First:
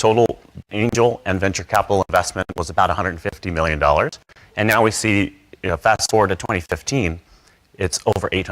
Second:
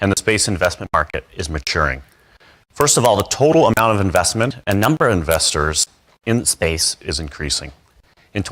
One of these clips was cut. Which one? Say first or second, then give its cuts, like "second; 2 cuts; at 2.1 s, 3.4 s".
first; 1 cut; at 4.3 s